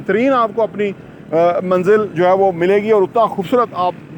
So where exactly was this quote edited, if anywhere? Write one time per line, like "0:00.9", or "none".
none